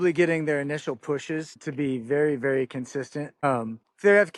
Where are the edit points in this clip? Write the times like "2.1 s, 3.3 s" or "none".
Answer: none